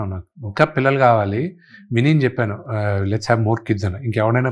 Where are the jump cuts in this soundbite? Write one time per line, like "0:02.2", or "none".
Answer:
none